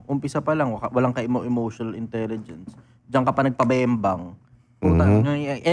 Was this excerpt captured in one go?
yes; 0 cuts

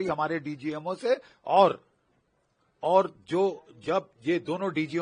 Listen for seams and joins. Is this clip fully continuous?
yes; 0 cuts

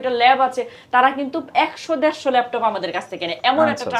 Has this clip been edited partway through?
no; 0 cuts

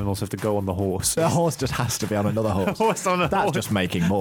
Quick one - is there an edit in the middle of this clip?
yes; 1 cut; at 1.2 s

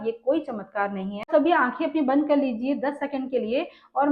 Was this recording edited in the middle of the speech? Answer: yes; 1 cut; at 1.3 s

